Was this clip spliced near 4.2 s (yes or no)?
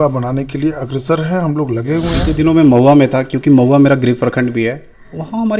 no